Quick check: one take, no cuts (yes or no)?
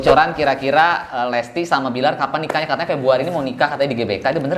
yes